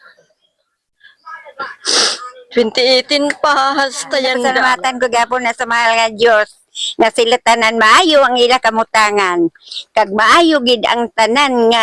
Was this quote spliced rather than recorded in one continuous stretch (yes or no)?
yes